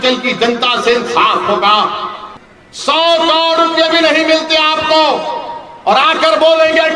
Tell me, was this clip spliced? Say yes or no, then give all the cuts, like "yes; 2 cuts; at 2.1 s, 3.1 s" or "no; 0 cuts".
yes; 1 cut; at 2.2 s